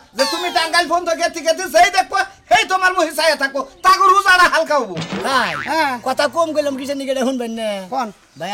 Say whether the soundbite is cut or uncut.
cut